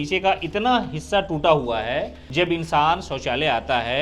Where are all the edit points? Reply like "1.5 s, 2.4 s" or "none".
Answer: 2.2 s